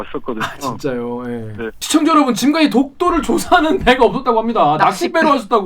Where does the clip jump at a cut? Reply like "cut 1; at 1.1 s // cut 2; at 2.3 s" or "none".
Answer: cut 1; at 1.8 s